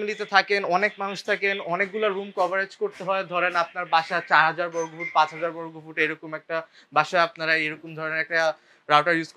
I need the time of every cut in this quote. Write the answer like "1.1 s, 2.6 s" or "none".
none